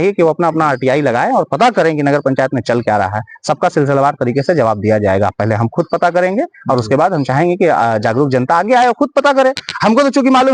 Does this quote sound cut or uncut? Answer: uncut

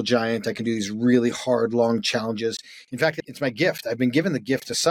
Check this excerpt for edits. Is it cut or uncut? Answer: cut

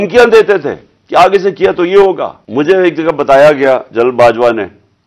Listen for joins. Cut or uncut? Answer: cut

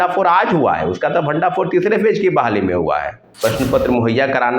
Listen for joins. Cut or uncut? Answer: cut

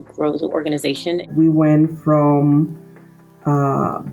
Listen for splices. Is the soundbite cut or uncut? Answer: cut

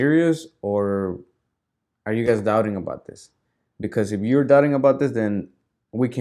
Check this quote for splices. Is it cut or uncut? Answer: uncut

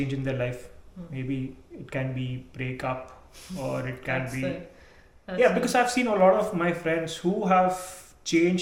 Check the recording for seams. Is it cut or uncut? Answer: uncut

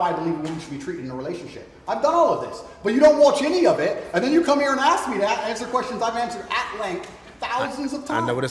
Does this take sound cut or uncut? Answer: uncut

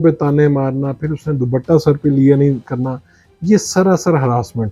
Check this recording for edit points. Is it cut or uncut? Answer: uncut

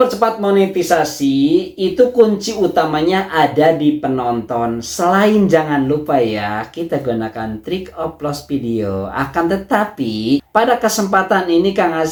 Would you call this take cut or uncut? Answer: uncut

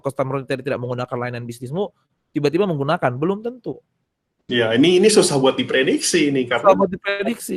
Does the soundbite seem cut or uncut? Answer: uncut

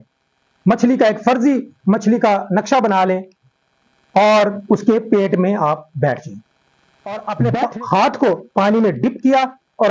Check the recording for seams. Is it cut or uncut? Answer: cut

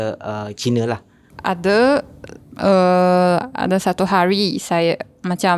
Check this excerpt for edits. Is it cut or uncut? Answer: uncut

